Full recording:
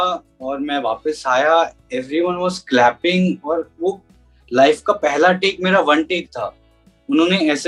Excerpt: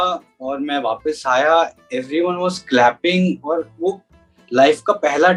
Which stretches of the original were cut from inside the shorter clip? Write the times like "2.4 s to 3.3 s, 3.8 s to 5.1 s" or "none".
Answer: none